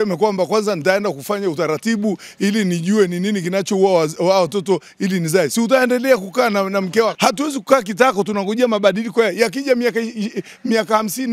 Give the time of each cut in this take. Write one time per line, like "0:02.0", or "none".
0:07.1